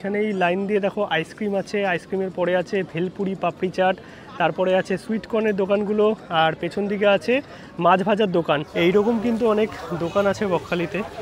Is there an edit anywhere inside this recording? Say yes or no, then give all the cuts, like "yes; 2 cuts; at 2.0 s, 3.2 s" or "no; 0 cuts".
yes; 1 cut; at 8.7 s